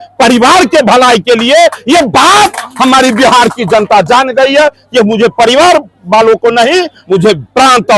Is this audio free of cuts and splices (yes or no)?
yes